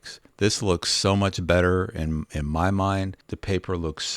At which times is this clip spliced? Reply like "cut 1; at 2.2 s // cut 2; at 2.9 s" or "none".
cut 1; at 3.3 s